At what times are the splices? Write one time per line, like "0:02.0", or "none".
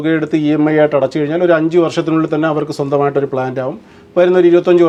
none